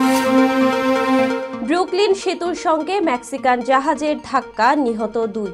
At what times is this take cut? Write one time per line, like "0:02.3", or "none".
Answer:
0:01.5